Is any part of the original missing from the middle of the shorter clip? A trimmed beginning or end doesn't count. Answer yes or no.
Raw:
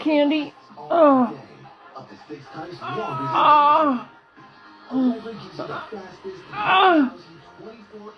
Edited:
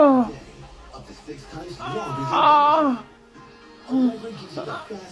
no